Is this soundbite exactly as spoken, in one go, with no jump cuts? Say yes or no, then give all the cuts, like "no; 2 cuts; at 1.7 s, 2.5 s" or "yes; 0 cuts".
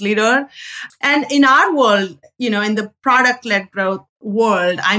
no; 1 cut; at 4.1 s